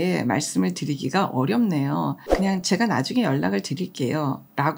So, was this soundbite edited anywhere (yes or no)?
yes